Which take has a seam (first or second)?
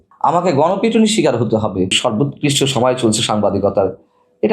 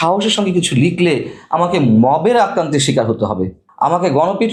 first